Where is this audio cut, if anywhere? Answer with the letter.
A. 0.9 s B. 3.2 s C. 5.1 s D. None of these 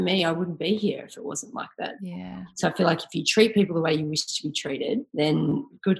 C